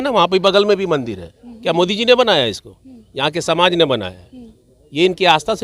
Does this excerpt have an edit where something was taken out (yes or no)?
no